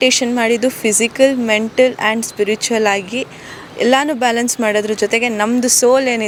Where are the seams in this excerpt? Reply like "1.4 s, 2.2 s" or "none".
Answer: none